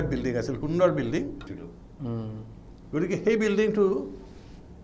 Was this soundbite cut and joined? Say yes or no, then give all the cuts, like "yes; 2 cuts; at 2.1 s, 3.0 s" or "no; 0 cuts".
yes; 1 cut; at 1.5 s